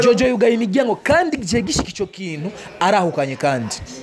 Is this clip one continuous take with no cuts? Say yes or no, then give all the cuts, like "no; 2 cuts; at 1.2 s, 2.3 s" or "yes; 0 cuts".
yes; 0 cuts